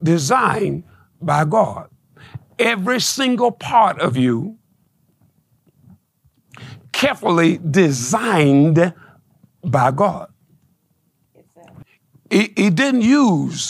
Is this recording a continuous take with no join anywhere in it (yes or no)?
no